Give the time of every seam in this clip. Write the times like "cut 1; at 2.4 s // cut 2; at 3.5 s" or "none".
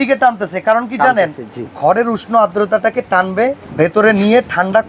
cut 1; at 3.6 s